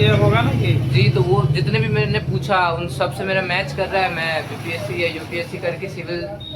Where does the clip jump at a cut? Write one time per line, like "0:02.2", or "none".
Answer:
none